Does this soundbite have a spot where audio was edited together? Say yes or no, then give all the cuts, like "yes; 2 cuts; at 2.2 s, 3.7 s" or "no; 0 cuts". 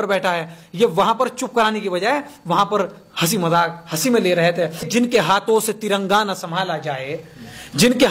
yes; 1 cut; at 4.9 s